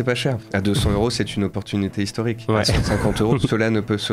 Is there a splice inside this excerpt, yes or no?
no